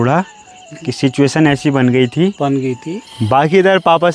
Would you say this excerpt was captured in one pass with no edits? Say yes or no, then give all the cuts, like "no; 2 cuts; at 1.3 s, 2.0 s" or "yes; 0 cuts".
no; 1 cut; at 3.1 s